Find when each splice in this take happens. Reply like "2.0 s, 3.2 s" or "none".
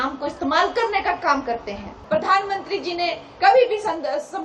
1.9 s